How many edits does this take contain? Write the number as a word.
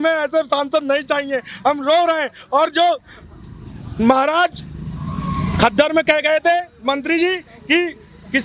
zero